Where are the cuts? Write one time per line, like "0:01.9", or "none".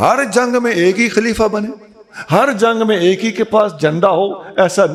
none